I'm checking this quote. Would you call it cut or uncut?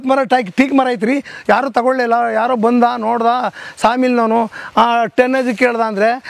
uncut